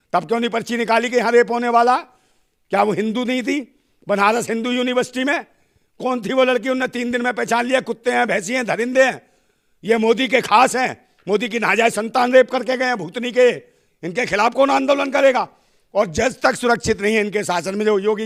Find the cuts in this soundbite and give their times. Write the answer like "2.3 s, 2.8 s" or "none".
none